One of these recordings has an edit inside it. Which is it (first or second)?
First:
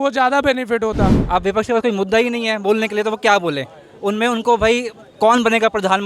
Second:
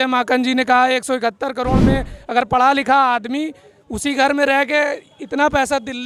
first